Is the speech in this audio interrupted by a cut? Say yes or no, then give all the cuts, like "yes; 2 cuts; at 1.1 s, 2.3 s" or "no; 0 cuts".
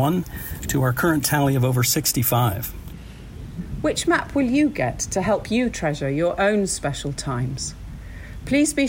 yes; 1 cut; at 3.1 s